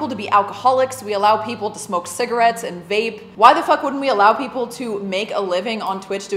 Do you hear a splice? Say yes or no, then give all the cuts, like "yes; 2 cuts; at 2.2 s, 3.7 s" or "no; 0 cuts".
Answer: no; 0 cuts